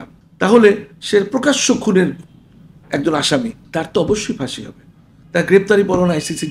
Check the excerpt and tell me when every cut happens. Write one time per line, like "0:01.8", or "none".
0:03.6